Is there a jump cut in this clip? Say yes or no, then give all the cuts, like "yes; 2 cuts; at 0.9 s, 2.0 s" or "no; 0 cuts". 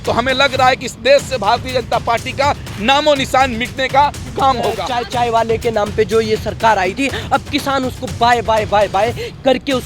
yes; 1 cut; at 4.8 s